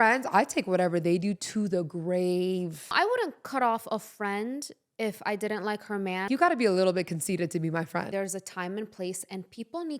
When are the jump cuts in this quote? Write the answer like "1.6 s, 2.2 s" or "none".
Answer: 2.9 s, 6.3 s, 8.1 s